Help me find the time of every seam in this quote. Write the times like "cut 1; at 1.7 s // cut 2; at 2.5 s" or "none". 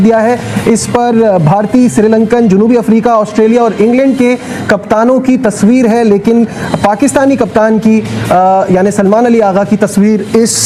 none